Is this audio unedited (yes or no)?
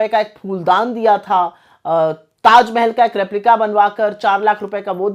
yes